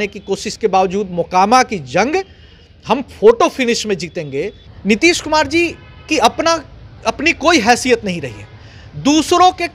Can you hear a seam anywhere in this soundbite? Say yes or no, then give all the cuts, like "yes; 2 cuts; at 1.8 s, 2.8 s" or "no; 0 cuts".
yes; 1 cut; at 4.6 s